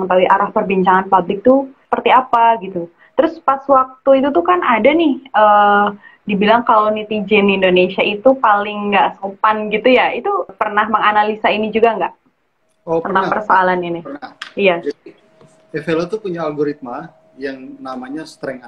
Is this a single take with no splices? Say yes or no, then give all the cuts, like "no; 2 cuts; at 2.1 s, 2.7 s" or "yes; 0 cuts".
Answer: no; 2 cuts; at 1.8 s, 10.6 s